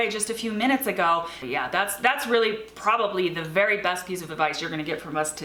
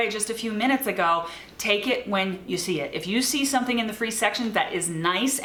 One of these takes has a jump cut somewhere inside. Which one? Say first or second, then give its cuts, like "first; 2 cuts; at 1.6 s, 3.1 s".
first; 1 cut; at 1.4 s